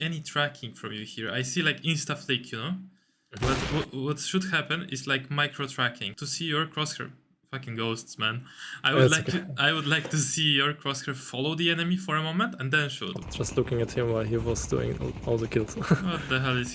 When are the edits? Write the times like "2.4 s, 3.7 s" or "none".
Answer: 6.1 s, 13.2 s